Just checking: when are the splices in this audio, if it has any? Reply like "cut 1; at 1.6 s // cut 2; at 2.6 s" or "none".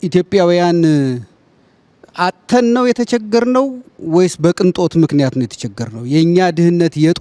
none